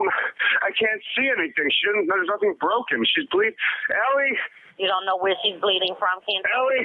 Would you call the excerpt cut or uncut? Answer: uncut